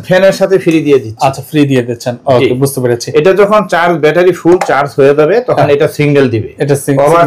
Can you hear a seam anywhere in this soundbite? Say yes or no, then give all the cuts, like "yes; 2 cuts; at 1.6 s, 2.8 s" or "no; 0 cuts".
no; 0 cuts